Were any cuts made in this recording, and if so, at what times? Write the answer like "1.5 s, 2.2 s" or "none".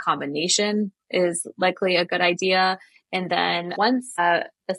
none